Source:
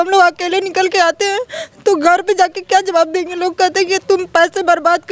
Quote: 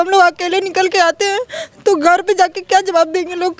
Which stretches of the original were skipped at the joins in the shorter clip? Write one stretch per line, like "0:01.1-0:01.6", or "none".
none